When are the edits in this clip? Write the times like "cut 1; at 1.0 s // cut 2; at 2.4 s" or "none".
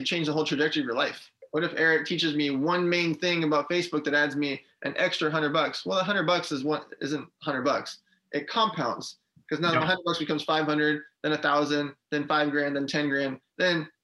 cut 1; at 1.3 s